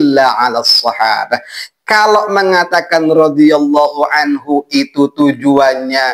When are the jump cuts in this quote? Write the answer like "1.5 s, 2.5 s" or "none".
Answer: none